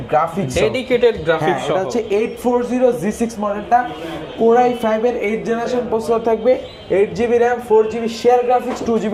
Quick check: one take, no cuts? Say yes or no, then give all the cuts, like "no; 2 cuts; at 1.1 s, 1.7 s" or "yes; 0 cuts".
yes; 0 cuts